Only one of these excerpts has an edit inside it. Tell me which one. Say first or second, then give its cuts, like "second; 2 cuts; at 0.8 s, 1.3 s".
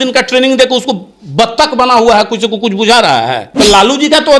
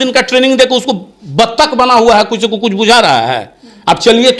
first; 1 cut; at 3.4 s